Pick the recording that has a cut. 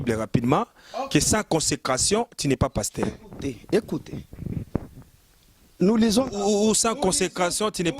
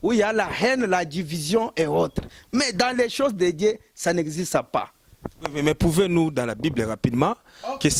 first; 1 cut; at 5.8 s

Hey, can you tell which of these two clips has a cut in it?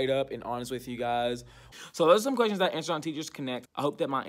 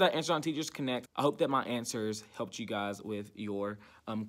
first; 1 cut; at 1.7 s

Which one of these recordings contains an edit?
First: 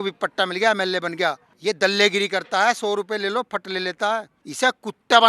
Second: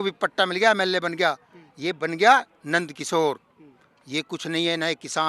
first; 2 cuts; at 1.5 s, 4.4 s

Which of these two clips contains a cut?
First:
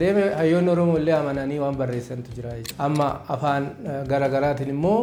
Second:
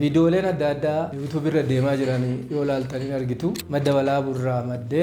second; 2 cuts; at 1.2 s, 3.6 s

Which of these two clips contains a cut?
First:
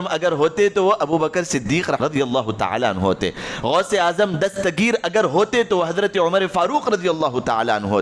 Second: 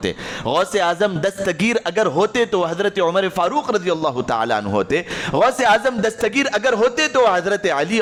first; 1 cut; at 2.0 s

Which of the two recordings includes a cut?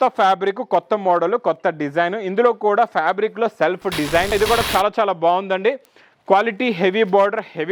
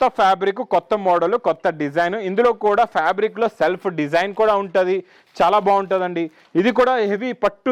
first; 1 cut; at 4.3 s

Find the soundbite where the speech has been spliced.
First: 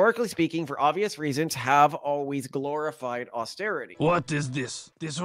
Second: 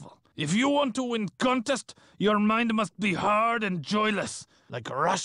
first; 1 cut; at 3.9 s

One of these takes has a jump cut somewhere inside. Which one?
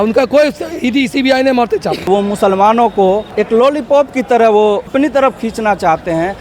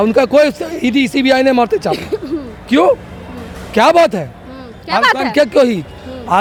first; 3 cuts; at 2.1 s, 3.3 s, 4.9 s

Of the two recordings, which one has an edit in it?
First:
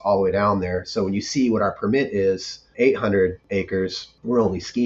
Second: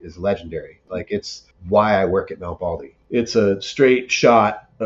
second; 2 cuts; at 0.8 s, 2.9 s

